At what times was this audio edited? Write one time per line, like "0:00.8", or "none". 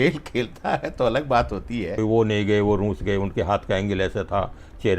0:01.9